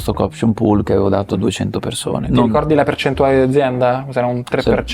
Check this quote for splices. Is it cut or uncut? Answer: uncut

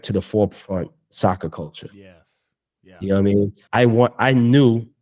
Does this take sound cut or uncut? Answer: cut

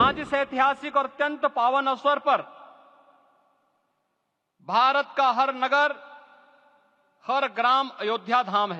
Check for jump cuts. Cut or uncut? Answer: uncut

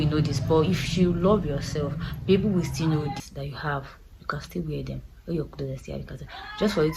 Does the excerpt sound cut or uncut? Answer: cut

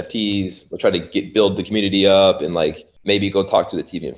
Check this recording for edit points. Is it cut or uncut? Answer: cut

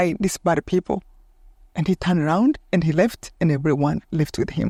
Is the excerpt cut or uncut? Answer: uncut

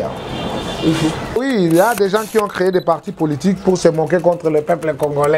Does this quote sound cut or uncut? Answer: cut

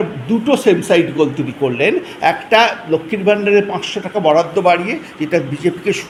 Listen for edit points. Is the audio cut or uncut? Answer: uncut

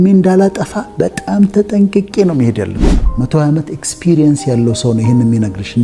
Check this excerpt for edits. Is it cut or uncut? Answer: cut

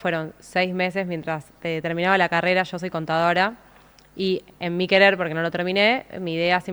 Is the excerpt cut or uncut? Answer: uncut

